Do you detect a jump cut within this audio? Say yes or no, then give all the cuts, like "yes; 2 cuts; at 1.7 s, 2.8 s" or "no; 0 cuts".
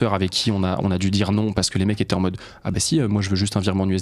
no; 0 cuts